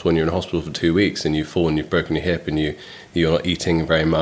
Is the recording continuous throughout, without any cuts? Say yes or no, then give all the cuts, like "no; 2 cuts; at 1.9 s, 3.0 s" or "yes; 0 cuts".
yes; 0 cuts